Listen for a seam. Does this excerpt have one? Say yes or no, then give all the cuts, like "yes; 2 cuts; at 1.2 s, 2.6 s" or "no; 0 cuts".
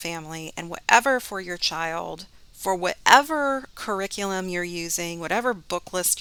no; 0 cuts